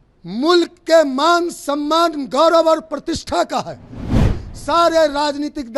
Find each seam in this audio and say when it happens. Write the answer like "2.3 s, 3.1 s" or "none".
4.3 s